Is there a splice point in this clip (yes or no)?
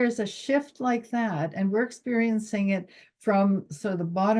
no